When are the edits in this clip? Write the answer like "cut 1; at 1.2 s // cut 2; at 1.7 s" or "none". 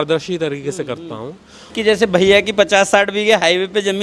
cut 1; at 1.6 s